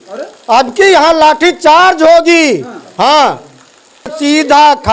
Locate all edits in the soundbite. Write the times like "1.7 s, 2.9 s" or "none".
3.8 s